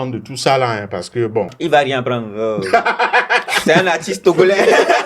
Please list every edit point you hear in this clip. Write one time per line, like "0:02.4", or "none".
0:01.5